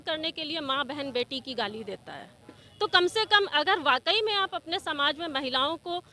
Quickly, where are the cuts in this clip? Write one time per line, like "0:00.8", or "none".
none